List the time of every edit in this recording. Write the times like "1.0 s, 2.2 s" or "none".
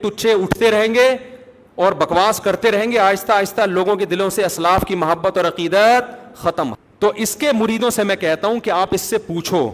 6.7 s